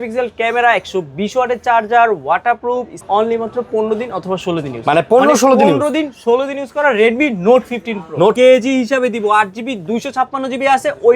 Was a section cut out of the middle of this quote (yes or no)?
yes